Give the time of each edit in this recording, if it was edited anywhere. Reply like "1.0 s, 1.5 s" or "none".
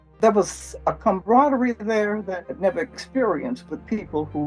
1.0 s, 2.5 s

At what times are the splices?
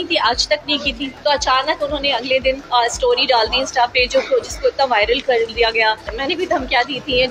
1.1 s, 2.6 s, 6.1 s

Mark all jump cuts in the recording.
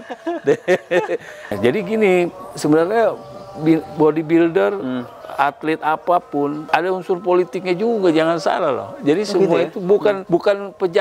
1.5 s, 6.6 s, 10.2 s

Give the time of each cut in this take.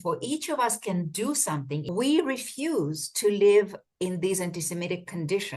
1.8 s

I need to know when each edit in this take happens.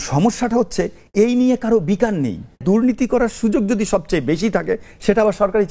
2.6 s

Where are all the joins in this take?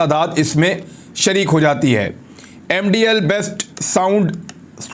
none

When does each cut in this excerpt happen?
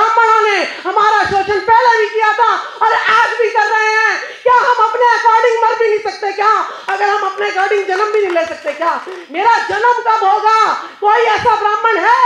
9.1 s

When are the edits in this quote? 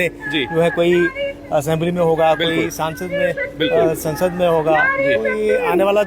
none

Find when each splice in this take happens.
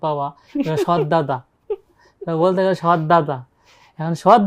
none

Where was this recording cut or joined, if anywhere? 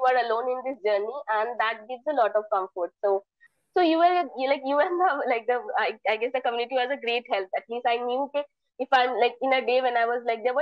3.4 s

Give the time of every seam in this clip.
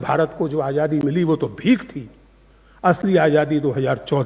none

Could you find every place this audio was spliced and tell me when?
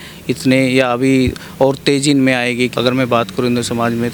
2.7 s

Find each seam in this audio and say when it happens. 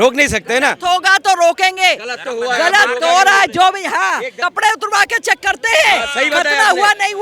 4.3 s

